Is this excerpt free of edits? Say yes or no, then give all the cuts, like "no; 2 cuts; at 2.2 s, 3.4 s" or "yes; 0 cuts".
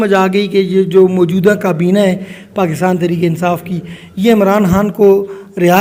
yes; 0 cuts